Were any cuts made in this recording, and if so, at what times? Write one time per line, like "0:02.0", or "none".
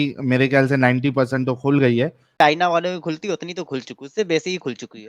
0:02.3